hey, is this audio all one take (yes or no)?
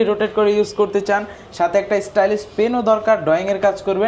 yes